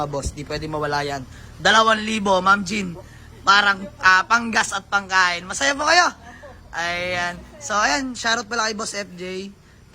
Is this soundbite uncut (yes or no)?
yes